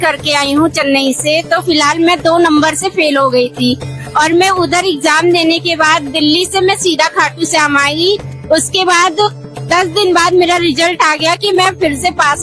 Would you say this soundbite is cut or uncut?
uncut